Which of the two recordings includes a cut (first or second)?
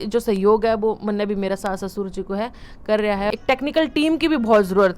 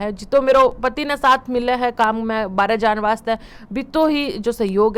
first